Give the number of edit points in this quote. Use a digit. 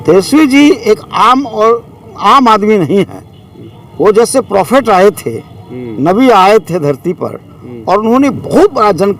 0